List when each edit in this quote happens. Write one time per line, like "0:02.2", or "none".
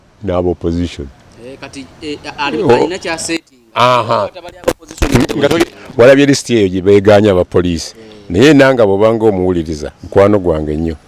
0:05.8